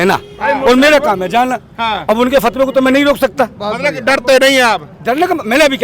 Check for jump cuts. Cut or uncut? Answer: uncut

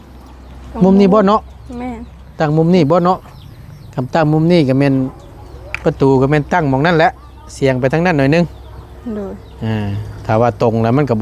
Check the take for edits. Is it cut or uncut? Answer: uncut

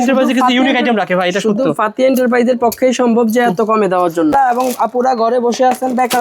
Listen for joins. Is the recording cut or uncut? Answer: cut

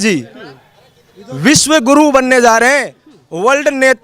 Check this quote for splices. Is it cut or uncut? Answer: uncut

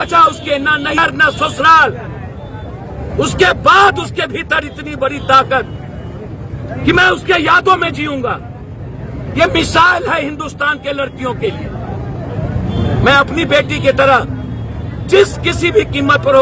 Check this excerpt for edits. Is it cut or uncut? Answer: cut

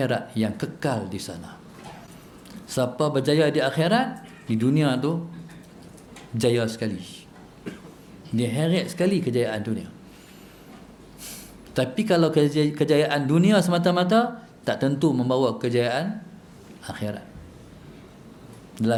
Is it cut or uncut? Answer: uncut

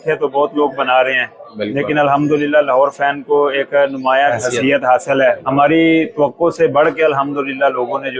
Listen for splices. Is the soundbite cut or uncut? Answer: cut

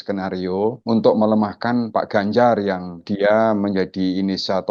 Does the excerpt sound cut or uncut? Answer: cut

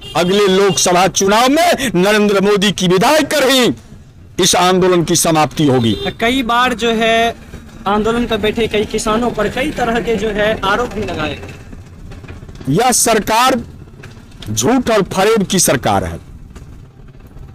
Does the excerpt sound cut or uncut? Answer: uncut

